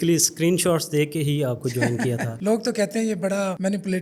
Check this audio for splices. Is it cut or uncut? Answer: uncut